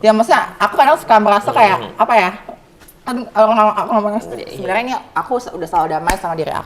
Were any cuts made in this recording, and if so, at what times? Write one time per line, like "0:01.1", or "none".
0:04.5

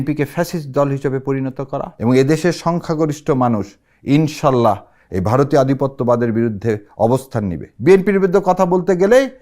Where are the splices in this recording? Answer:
0:01.9
0:07.7

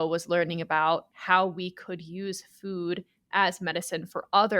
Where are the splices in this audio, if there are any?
0:01.1

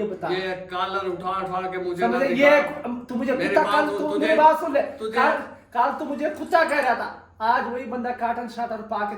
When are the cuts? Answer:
none

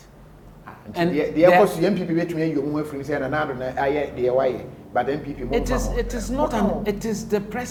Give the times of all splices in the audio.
none

